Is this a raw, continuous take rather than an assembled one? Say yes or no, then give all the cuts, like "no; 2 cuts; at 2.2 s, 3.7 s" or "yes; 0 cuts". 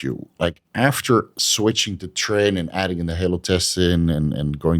no; 1 cut; at 1.4 s